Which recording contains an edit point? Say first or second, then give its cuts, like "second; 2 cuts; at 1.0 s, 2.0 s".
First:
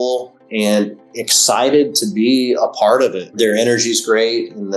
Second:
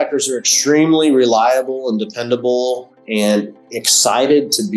first; 1 cut; at 3.3 s